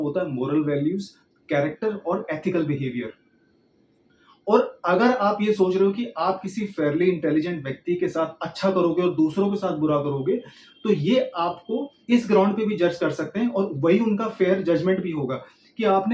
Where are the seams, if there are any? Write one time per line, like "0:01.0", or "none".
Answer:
none